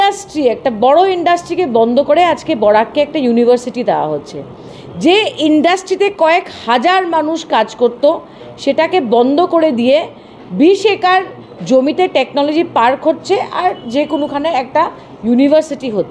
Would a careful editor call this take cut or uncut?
uncut